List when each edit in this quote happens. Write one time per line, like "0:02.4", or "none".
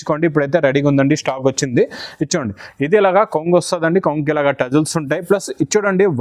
none